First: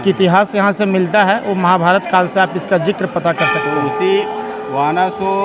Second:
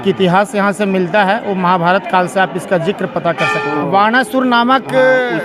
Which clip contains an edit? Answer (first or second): second